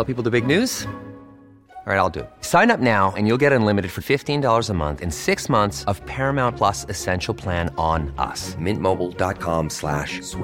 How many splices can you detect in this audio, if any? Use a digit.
0